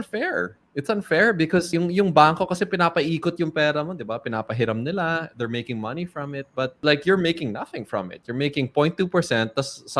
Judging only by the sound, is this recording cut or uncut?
cut